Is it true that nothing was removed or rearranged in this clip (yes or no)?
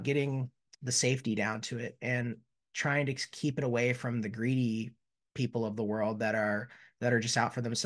yes